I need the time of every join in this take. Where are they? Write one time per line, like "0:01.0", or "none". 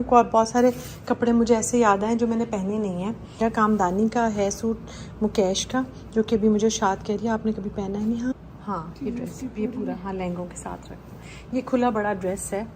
0:03.4
0:08.3